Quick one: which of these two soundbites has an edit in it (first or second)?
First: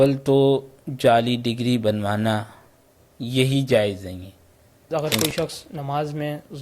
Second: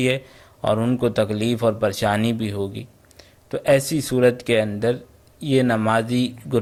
first